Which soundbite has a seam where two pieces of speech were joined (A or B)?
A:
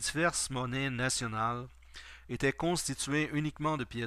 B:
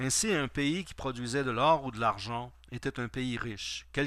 A